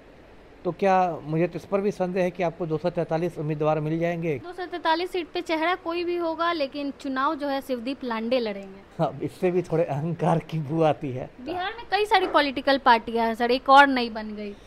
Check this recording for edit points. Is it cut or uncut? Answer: cut